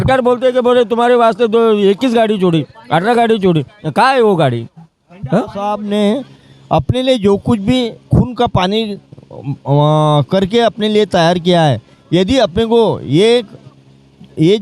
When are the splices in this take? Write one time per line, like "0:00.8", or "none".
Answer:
0:05.8